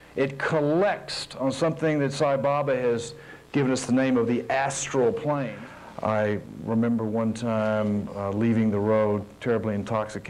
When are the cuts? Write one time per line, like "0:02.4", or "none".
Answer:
0:05.5